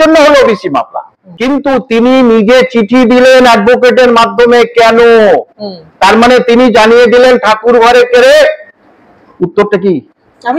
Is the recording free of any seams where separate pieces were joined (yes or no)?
no